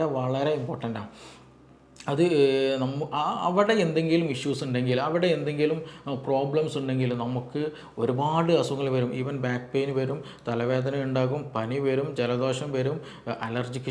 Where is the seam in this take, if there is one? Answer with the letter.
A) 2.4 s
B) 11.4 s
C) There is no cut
C